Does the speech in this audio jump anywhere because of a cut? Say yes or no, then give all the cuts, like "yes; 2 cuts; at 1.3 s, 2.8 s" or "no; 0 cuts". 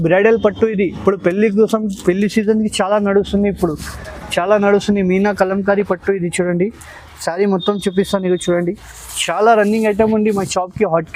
no; 0 cuts